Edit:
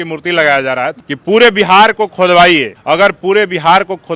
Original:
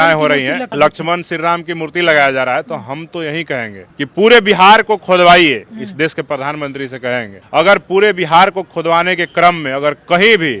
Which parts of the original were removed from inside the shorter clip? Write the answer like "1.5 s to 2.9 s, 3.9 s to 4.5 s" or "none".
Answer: 2.7 s to 3.9 s, 5.6 s to 7.4 s